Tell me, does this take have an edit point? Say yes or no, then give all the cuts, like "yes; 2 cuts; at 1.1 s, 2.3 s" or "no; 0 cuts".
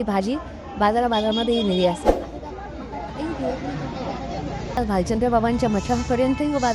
yes; 1 cut; at 4.7 s